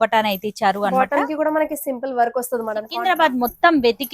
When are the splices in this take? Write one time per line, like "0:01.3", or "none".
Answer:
0:02.9